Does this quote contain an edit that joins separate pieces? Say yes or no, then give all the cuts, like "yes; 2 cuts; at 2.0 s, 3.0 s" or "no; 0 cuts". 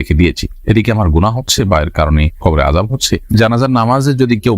yes; 1 cut; at 3.3 s